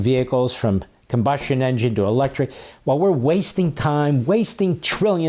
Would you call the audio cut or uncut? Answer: uncut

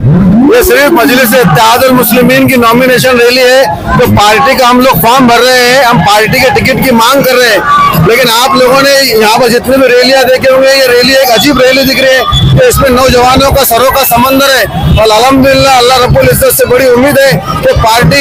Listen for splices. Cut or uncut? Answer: uncut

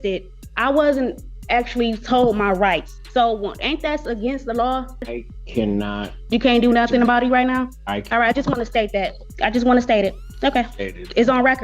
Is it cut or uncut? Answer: cut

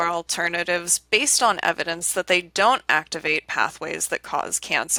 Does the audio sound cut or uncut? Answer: uncut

